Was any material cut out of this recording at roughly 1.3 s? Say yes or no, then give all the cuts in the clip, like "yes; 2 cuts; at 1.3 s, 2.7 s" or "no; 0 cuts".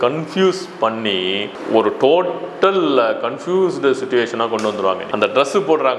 no; 1 cut; at 5.1 s